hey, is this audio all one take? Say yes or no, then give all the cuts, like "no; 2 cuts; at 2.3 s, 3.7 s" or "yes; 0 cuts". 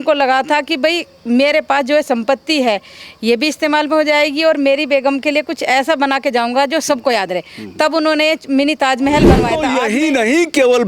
no; 1 cut; at 9.6 s